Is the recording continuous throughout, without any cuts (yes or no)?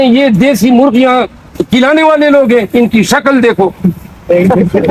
yes